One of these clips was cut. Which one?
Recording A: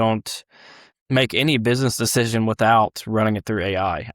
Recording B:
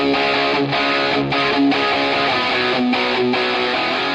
A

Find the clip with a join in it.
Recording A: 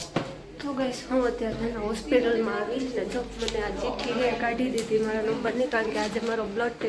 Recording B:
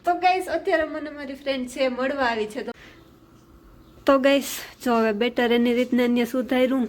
B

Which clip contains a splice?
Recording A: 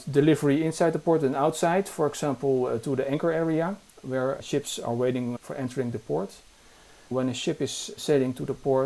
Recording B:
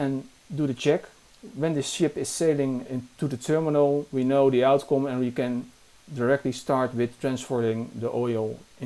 A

